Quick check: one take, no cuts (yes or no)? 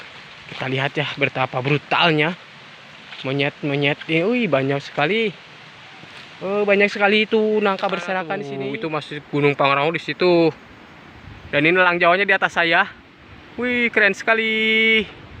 no